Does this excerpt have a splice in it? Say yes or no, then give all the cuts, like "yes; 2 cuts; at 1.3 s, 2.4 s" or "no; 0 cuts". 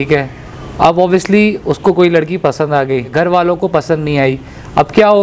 yes; 1 cut; at 3.1 s